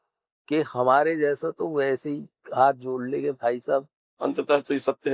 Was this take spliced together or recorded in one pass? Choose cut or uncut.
cut